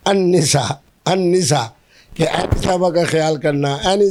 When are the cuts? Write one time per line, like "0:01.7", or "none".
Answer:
none